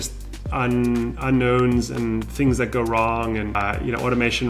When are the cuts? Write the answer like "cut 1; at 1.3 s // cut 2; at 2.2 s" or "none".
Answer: cut 1; at 3.5 s